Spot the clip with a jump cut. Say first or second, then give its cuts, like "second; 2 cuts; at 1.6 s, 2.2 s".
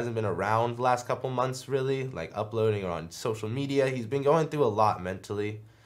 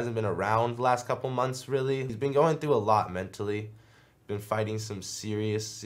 second; 1 cut; at 2.1 s